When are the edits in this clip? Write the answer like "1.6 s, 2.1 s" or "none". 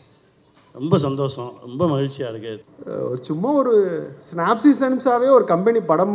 2.5 s

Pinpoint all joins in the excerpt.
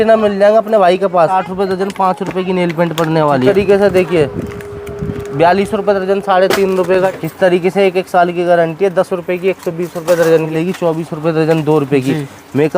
1.4 s, 3.5 s, 7.1 s, 10.5 s

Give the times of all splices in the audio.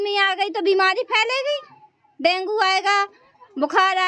none

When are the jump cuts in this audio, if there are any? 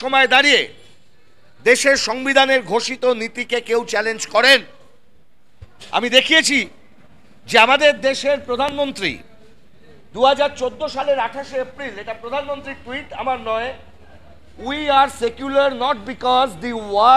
none

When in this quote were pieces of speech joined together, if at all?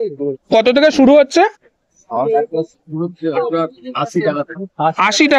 none

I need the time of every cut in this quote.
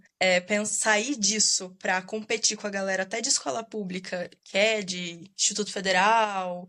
none

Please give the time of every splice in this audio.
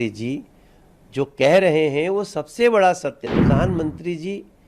3.2 s

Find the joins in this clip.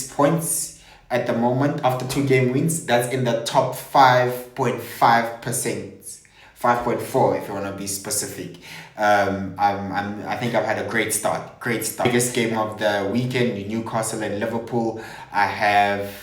12.1 s

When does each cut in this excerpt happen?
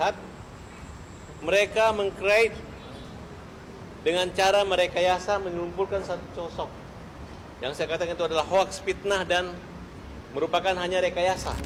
none

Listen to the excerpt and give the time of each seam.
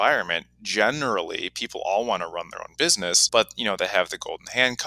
3.2 s

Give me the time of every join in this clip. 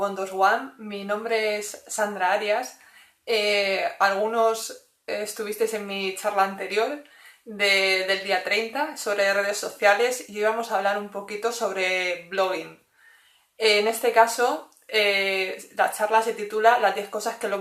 16.4 s

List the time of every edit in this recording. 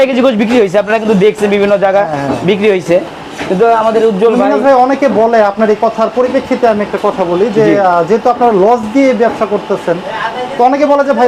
none

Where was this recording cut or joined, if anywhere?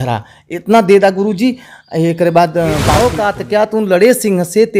3.0 s

